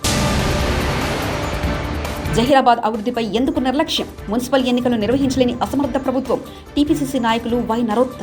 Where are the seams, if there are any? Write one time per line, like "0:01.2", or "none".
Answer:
0:02.0